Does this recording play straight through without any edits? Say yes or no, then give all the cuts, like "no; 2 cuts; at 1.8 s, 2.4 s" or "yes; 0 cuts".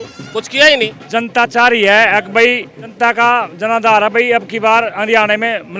no; 2 cuts; at 1.0 s, 2.8 s